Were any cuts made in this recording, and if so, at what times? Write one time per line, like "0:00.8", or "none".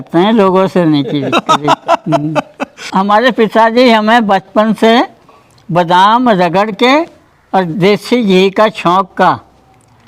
0:02.8